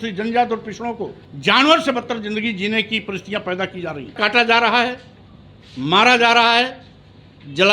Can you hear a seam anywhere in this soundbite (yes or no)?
yes